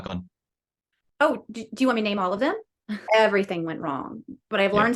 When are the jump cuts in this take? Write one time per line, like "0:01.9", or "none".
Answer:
0:03.0